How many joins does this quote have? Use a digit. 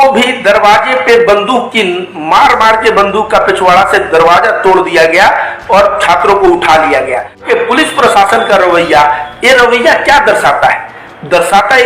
1